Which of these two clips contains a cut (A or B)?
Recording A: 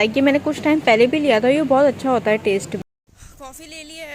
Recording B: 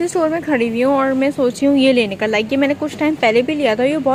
A